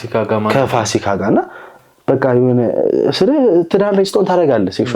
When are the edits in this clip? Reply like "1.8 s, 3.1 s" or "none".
1.8 s